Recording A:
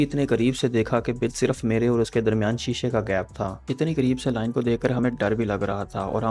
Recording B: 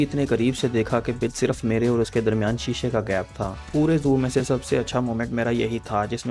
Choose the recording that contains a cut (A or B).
B